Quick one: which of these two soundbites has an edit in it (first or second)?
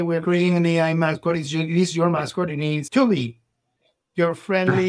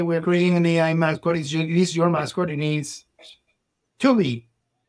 first